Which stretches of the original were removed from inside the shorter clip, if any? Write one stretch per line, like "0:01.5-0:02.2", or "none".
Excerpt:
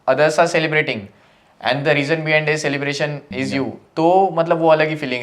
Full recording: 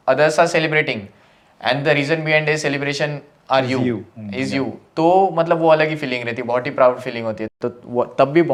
0:03.2-0:04.2